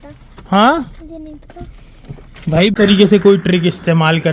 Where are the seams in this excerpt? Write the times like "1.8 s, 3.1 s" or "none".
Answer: 2.3 s